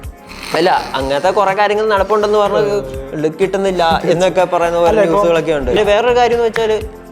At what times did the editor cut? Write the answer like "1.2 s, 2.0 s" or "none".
5.8 s